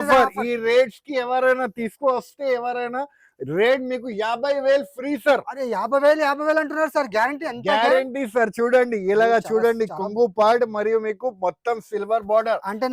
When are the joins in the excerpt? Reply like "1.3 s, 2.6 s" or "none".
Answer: none

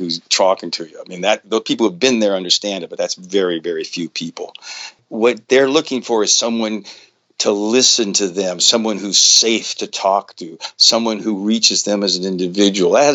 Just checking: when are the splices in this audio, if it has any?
5.0 s

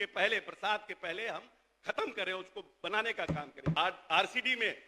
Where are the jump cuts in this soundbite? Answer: 3.7 s

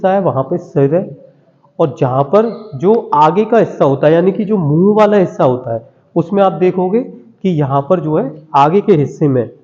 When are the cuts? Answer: none

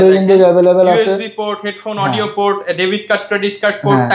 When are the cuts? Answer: none

